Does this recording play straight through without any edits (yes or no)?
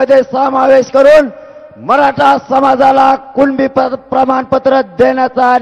yes